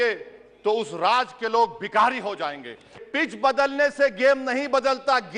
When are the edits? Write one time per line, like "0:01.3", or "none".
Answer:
0:03.0